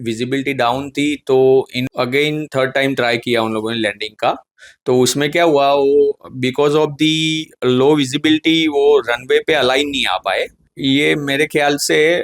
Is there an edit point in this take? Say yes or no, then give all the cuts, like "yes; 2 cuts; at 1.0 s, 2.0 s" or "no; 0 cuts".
yes; 2 cuts; at 1.8 s, 10.6 s